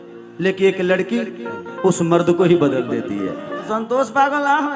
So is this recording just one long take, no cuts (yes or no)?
no